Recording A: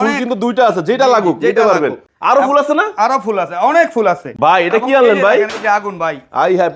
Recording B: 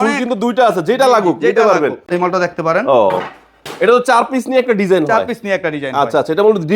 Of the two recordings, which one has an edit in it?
B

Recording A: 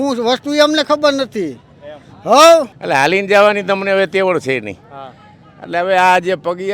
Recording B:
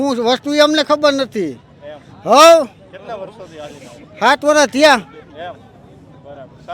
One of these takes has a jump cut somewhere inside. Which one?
A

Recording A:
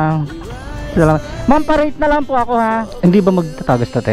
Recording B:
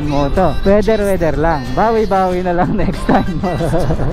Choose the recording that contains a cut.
A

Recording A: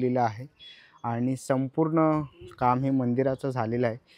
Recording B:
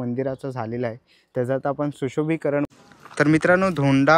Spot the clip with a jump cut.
B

